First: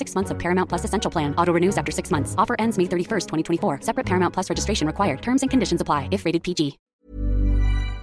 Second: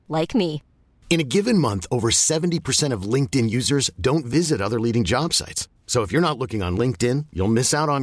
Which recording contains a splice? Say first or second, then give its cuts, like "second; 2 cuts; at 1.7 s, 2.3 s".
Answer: first; 1 cut; at 6.8 s